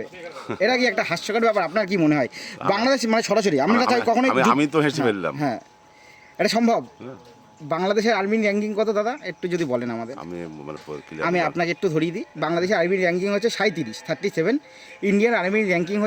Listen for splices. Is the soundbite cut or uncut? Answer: uncut